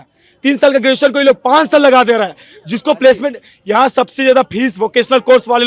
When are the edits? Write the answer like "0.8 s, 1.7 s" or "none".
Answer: none